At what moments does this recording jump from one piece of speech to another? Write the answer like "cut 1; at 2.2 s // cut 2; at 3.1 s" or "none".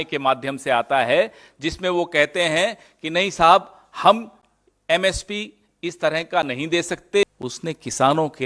cut 1; at 7.2 s